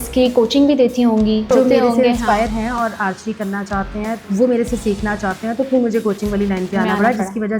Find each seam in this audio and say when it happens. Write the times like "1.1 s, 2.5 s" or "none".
1.5 s, 4.2 s

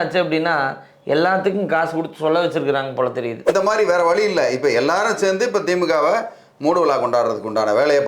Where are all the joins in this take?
3.5 s

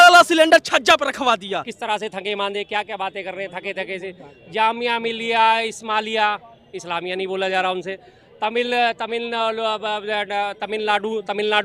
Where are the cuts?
1.7 s

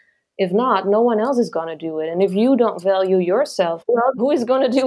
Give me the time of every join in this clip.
none

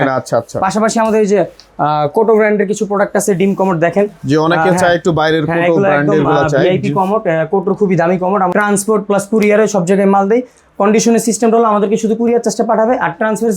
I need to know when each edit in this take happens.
8.5 s

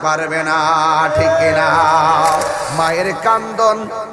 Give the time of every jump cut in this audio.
2.7 s

